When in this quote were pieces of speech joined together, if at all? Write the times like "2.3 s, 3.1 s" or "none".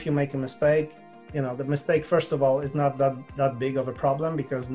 none